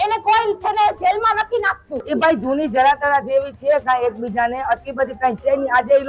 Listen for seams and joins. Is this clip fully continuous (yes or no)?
no